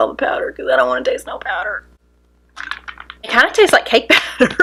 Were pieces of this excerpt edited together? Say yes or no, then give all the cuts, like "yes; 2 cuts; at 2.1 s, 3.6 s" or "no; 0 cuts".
no; 0 cuts